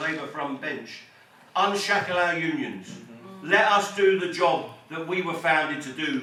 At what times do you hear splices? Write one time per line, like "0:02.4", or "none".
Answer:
none